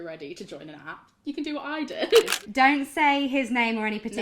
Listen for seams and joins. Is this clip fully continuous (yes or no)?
no